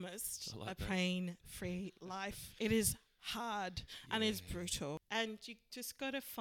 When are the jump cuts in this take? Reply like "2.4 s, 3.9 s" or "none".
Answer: 2.4 s, 5.0 s